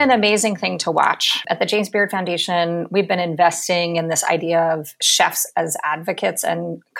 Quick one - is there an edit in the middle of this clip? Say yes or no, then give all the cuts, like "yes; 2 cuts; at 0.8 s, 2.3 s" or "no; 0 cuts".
yes; 1 cut; at 1.4 s